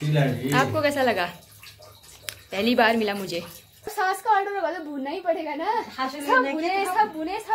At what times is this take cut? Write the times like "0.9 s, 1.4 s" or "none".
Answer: 3.8 s